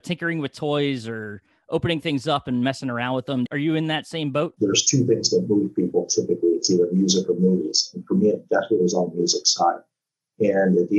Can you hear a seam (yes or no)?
yes